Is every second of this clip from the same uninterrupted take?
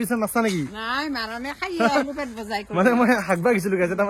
yes; 0 cuts

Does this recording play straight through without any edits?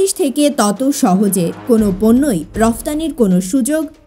yes; 0 cuts

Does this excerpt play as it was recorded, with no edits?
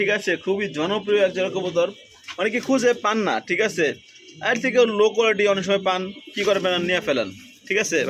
yes; 0 cuts

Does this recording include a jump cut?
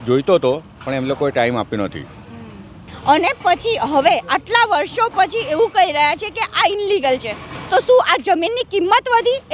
yes; 1 cut; at 2.8 s

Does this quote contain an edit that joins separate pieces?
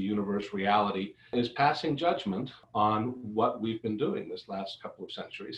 yes; 2 cuts; at 1.3 s, 2.6 s

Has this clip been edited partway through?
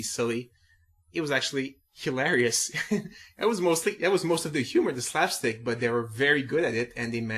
yes; 1 cut; at 2.8 s

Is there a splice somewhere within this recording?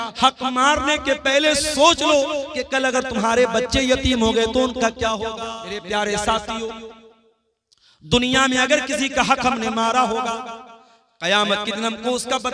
yes; 1 cut; at 5.8 s

